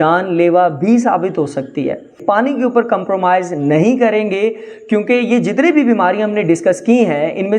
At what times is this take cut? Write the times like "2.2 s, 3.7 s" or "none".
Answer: 2.2 s